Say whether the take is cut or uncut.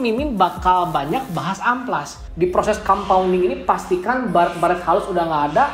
cut